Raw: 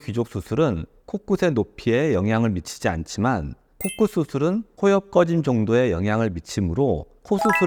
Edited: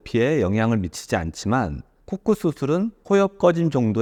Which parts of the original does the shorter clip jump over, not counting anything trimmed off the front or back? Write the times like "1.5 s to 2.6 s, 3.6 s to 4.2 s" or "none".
none